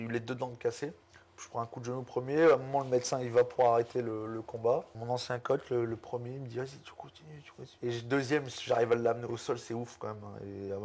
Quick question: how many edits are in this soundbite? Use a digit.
3